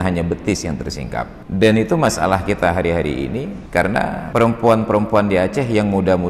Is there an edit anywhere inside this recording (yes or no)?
yes